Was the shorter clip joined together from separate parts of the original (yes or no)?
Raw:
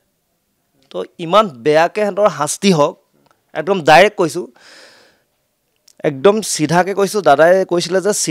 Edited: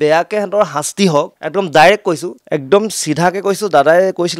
yes